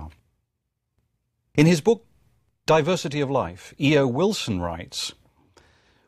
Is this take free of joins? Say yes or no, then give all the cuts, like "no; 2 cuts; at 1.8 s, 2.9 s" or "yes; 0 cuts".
no; 1 cut; at 1.4 s